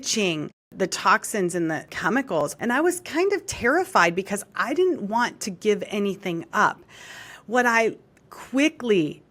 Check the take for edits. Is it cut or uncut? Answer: cut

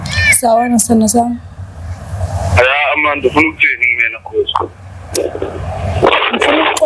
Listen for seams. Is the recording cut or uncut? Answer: uncut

